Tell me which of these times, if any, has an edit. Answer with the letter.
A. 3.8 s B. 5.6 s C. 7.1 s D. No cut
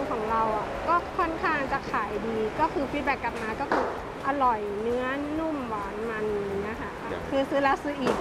C